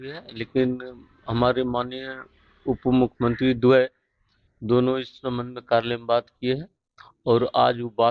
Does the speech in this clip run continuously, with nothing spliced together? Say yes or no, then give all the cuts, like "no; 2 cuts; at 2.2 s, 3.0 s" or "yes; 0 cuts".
yes; 0 cuts